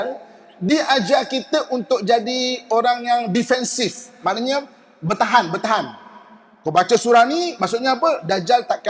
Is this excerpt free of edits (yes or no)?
yes